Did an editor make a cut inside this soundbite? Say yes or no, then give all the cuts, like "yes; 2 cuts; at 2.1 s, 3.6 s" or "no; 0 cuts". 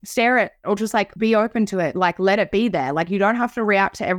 no; 0 cuts